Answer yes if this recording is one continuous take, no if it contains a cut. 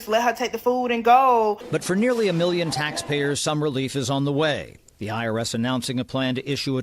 no